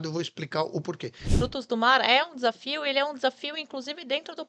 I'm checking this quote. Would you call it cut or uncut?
cut